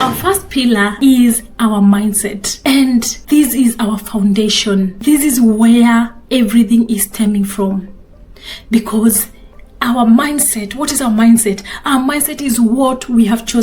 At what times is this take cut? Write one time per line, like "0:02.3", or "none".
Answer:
0:00.9
0:02.5
0:03.1
0:04.9